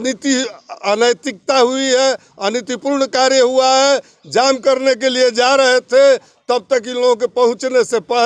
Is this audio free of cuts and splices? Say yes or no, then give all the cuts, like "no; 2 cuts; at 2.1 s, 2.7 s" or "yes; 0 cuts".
yes; 0 cuts